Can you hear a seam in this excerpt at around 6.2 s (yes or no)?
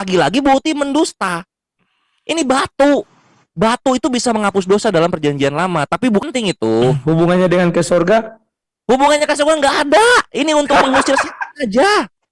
yes